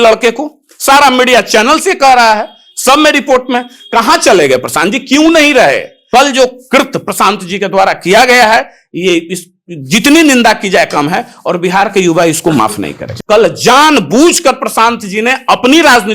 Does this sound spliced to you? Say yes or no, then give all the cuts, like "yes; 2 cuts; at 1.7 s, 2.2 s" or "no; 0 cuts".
yes; 2 cuts; at 6.1 s, 13.1 s